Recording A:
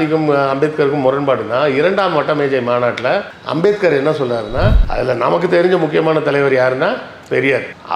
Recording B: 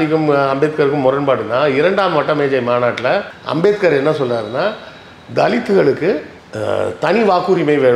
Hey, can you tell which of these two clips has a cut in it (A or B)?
A